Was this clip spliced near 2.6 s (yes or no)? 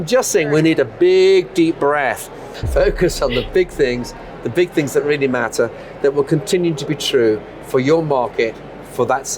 yes